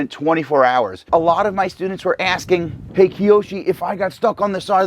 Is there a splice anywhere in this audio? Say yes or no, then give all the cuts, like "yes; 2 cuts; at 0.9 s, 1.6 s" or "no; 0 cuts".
yes; 2 cuts; at 1.1 s, 2.8 s